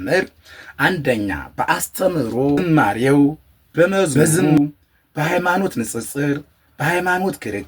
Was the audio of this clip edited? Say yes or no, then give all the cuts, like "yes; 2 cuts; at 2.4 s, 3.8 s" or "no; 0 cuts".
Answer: yes; 1 cut; at 2.6 s